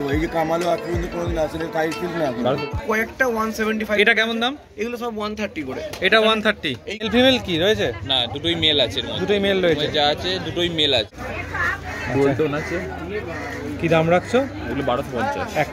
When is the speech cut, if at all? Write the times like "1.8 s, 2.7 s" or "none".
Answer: 2.7 s, 7.1 s, 11.1 s